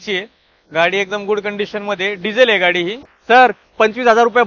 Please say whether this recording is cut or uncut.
cut